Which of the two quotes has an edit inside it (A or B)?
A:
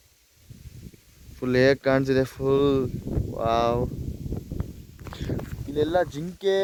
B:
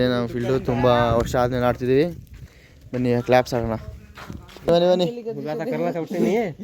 B